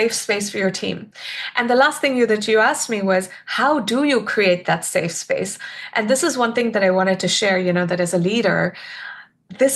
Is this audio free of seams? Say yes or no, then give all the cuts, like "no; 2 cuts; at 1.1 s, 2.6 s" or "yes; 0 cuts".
yes; 0 cuts